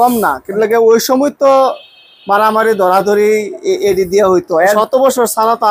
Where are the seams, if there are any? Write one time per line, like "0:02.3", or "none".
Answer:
0:04.7